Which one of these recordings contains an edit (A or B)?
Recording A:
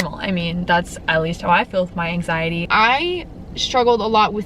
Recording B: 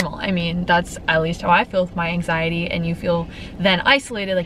A